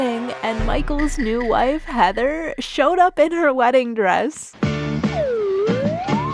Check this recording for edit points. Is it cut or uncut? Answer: uncut